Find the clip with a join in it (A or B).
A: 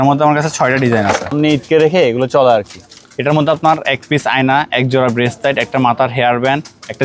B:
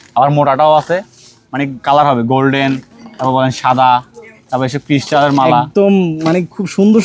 A